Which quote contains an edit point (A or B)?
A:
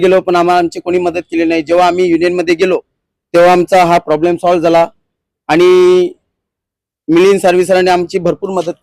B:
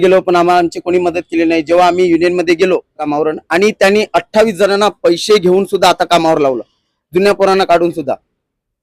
B